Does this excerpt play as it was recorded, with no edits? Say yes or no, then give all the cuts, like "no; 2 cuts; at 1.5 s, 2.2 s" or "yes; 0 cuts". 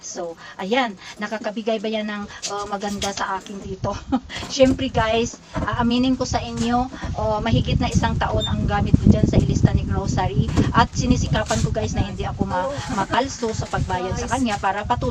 yes; 0 cuts